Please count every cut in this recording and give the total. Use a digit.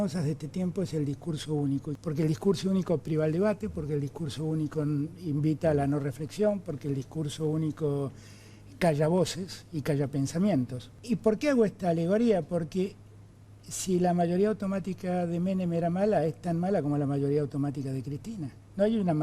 2